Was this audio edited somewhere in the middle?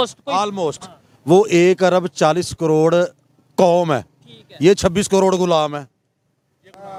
no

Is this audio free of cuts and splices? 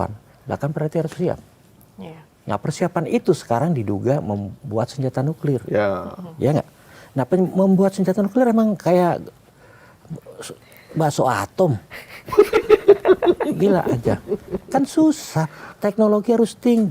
yes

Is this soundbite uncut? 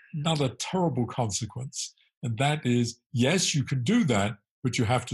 yes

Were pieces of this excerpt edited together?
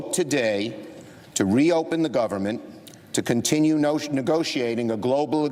no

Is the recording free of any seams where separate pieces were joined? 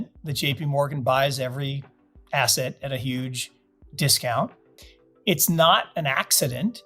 no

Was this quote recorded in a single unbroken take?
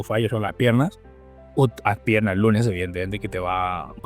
yes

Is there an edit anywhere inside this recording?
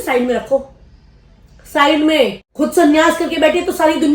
yes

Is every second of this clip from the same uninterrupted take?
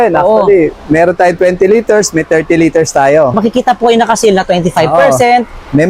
no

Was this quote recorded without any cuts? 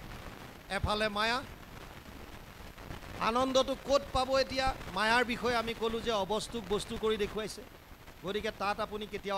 yes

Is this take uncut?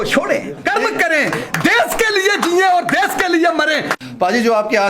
no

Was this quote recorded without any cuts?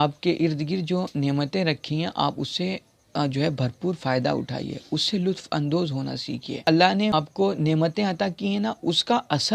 yes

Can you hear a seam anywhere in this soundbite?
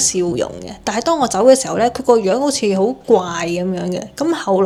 no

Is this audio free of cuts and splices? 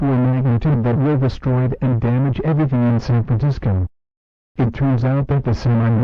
yes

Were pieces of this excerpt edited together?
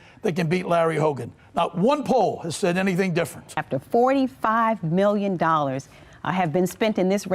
yes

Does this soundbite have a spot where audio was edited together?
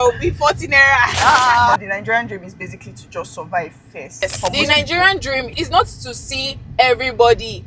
yes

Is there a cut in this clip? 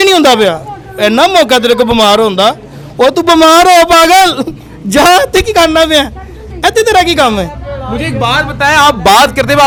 no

